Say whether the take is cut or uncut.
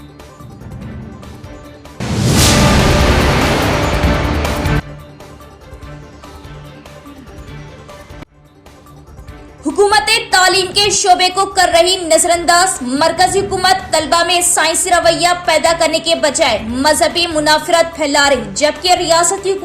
cut